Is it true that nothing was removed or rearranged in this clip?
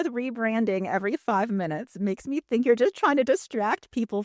yes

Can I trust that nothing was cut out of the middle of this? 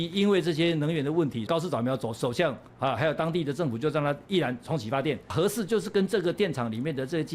no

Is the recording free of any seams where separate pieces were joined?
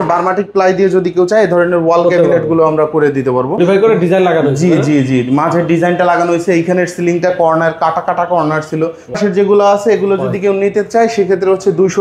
no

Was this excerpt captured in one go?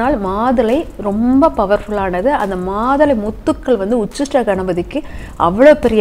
yes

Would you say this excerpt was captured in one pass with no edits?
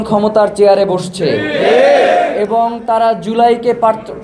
yes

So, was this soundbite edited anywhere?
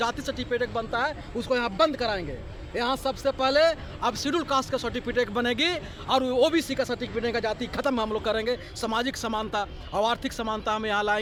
no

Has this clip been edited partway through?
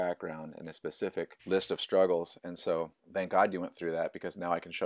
yes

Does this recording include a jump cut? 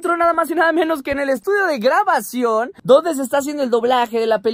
no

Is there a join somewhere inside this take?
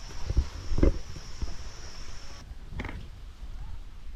no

